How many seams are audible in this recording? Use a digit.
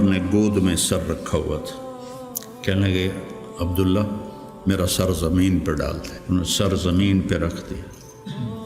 1